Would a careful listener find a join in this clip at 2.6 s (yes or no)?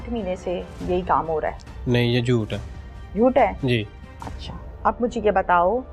no